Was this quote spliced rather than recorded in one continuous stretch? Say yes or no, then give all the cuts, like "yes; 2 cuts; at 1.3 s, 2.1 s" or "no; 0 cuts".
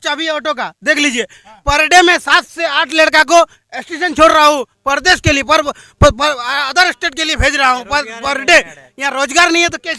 no; 0 cuts